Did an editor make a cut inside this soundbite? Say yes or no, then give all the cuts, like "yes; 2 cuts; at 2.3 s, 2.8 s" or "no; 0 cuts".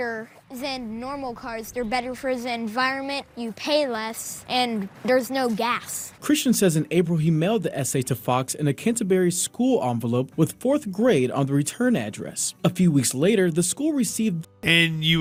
no; 0 cuts